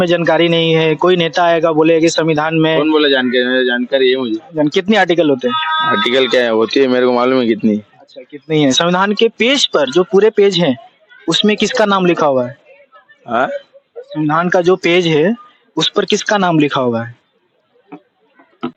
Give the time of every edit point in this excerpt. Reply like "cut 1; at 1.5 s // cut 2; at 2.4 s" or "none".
none